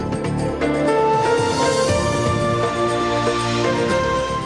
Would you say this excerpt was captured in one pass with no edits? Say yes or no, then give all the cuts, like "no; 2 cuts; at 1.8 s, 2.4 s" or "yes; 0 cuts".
no; 1 cut; at 2.7 s